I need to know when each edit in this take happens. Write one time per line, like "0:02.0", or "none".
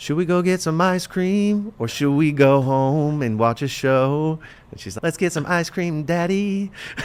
none